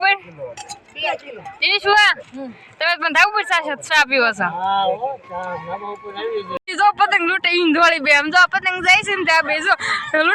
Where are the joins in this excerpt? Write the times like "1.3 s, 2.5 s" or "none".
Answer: 6.6 s